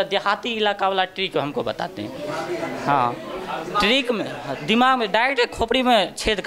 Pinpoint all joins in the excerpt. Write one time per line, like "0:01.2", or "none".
none